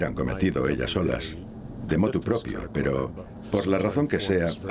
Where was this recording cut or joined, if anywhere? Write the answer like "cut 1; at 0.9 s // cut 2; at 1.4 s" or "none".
cut 1; at 3.4 s